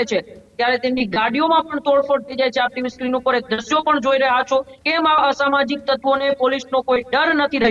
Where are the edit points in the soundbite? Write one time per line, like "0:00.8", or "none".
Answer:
0:04.8